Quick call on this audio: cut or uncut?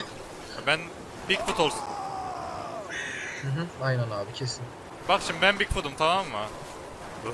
cut